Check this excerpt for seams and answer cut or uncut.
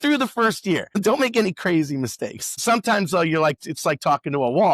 cut